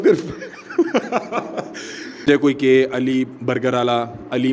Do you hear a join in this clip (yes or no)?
yes